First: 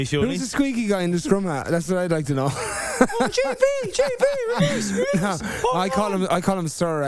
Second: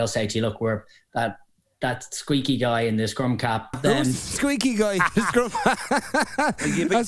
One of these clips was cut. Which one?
second; 1 cut; at 3.8 s

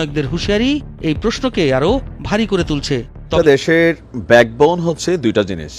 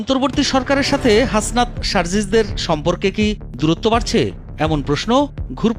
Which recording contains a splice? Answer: first; 1 cut; at 3.3 s

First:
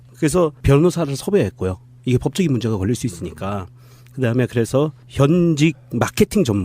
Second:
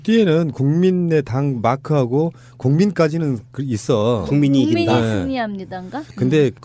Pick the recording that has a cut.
first; 1 cut; at 2.2 s

